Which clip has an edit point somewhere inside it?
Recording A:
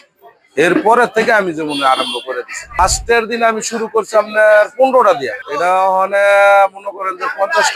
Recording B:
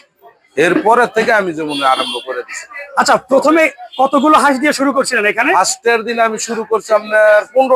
A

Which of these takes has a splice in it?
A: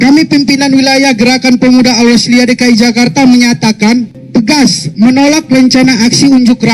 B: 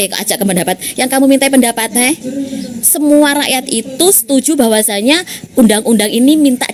A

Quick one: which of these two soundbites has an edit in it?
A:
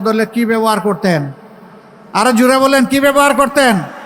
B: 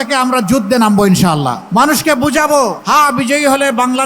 B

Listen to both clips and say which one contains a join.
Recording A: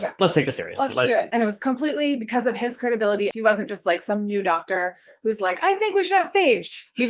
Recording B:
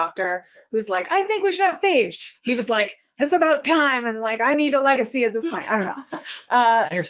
A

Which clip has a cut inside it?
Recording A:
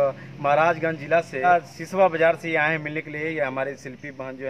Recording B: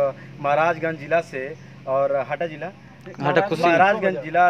A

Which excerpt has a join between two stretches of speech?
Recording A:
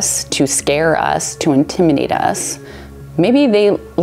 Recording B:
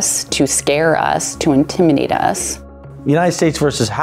B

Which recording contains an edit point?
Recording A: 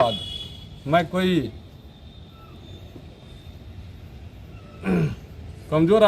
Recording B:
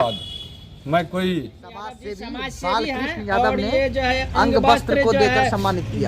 B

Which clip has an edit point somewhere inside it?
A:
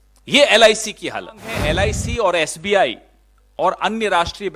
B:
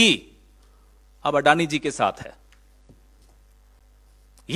A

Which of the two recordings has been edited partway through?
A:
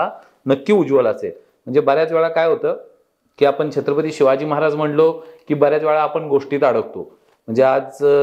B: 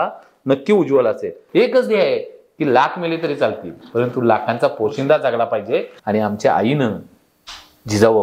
B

